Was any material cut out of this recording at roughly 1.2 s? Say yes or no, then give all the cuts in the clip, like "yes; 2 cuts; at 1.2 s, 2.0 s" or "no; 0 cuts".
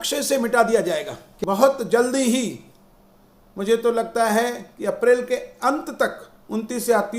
yes; 1 cut; at 1.2 s